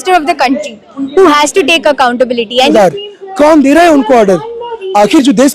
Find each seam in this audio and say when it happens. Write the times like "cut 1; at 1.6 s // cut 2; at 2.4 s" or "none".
cut 1; at 2.7 s